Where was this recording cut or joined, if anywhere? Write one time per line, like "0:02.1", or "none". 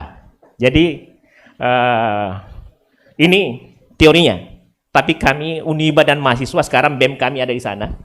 none

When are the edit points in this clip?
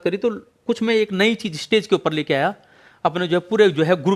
none

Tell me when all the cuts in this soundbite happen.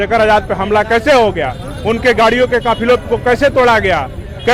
none

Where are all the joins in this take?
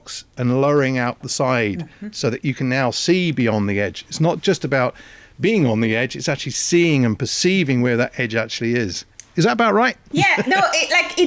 none

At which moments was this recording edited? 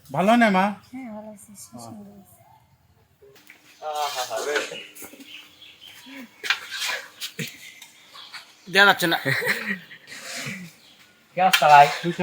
0:03.3

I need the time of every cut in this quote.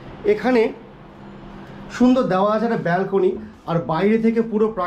none

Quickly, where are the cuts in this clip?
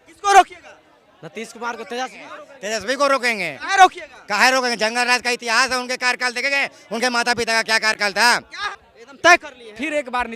0:08.5

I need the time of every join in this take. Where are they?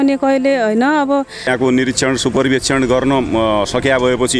0:01.5

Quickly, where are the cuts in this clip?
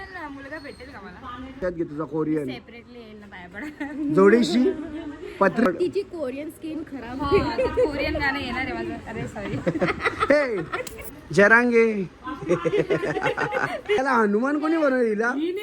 0:01.6
0:05.7
0:10.9
0:14.0

